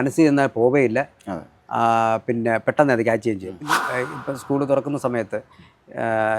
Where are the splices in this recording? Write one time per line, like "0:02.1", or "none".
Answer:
0:03.5